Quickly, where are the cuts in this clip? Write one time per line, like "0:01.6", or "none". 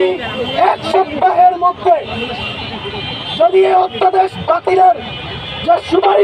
none